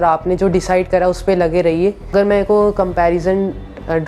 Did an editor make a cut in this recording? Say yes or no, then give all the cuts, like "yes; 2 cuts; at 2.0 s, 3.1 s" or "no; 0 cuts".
yes; 1 cut; at 2.1 s